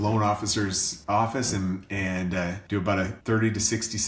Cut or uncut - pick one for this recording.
uncut